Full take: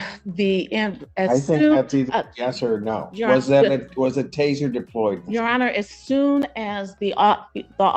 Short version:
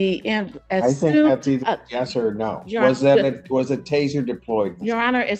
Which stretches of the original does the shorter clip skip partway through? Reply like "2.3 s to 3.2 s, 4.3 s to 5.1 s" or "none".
none

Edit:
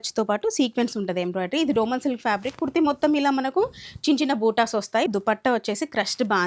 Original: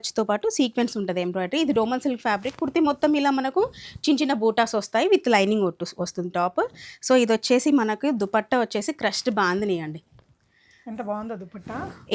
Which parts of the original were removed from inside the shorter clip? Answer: 5.1 s to 8.1 s

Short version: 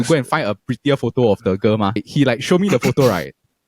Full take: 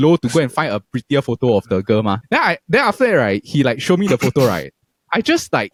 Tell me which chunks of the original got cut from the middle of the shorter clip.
2.2 s to 3.4 s

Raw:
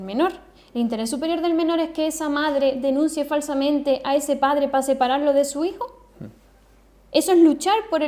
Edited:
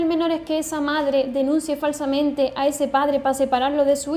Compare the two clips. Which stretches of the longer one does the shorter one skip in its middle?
none

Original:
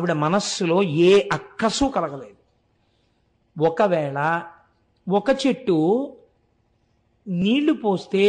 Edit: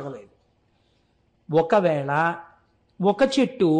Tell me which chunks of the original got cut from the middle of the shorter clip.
none

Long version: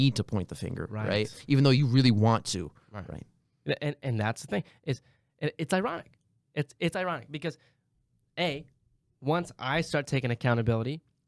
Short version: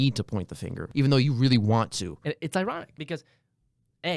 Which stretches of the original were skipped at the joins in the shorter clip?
0.8 s to 1.4 s, 2.7 s to 5.3 s, 6.1 s to 7.3 s

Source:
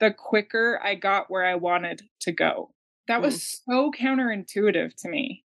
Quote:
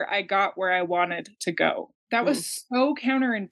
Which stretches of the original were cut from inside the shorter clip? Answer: 2.3 s to 2.6 s

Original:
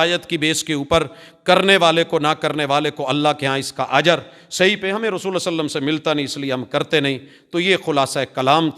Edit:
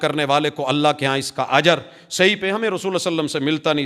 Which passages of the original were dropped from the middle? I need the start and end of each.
none

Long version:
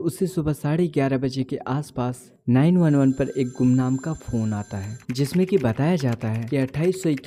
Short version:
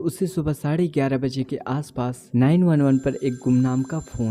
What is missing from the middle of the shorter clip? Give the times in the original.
2.2 s to 2.3 s

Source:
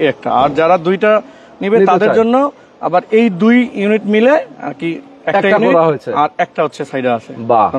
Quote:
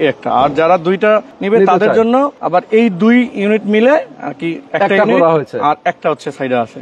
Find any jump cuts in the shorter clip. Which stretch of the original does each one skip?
1.3 s to 1.5 s, 2.6 s to 2.8 s, 5.0 s to 5.1 s

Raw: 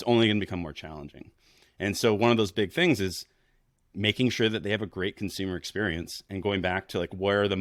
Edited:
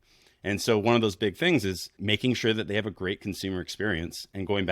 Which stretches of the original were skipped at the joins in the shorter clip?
3.3 s to 3.9 s

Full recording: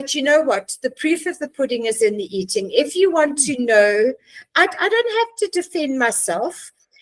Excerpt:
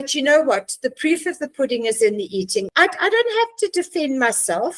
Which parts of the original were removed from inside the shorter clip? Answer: 2.7 s to 4.5 s

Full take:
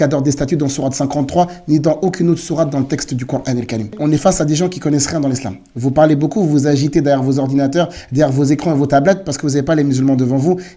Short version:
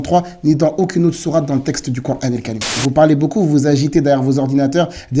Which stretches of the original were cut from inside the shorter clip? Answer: 3.8 s to 5.6 s

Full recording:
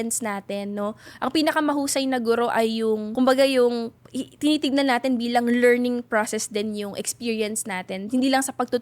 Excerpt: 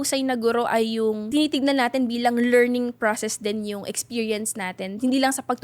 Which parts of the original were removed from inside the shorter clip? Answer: 3.1 s to 4.3 s

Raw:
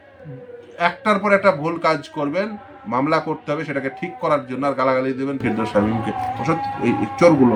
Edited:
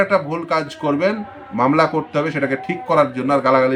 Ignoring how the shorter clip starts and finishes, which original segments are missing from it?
none

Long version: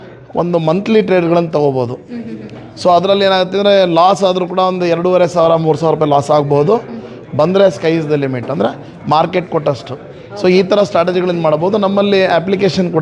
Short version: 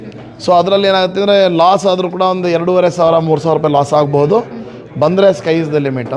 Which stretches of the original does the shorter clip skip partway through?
none

